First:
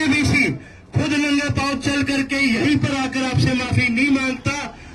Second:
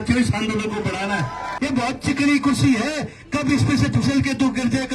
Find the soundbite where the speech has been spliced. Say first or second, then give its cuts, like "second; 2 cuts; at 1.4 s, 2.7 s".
second; 1 cut; at 1.4 s